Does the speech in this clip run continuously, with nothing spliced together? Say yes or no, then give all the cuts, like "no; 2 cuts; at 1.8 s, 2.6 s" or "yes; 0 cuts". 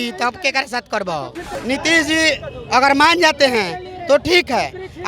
no; 1 cut; at 1.5 s